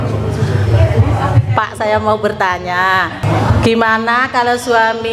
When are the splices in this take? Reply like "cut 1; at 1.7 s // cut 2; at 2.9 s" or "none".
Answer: cut 1; at 3.1 s

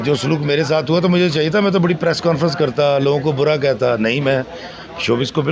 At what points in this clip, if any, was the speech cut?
none

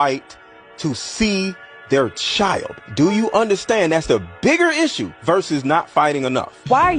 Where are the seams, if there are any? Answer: cut 1; at 2.7 s

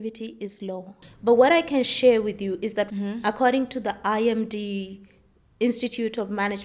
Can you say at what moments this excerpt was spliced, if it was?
cut 1; at 1.0 s // cut 2; at 2.9 s

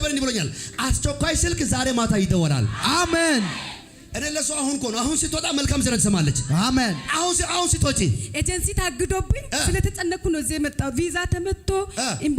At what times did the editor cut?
none

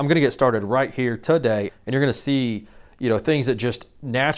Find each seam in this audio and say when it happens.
cut 1; at 1.7 s

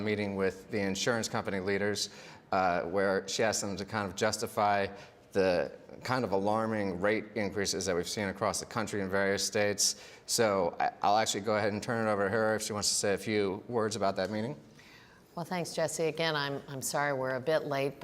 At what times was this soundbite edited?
cut 1; at 13.2 s

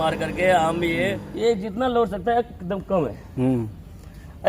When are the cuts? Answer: cut 1; at 1.2 s

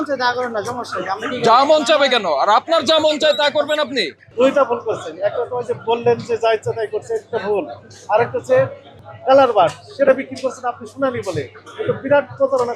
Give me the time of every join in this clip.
cut 1; at 4.2 s // cut 2; at 9.0 s

